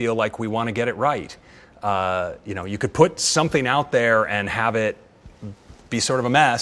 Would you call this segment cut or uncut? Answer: uncut